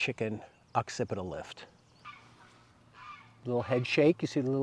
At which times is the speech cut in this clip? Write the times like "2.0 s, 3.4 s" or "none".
2.1 s, 3.4 s